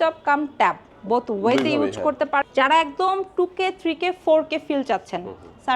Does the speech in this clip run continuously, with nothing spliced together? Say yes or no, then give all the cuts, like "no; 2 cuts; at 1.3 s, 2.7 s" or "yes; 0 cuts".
no; 1 cut; at 2.4 s